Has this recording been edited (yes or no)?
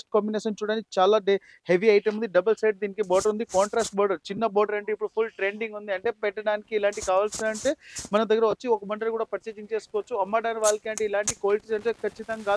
no